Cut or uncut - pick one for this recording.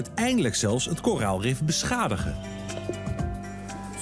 uncut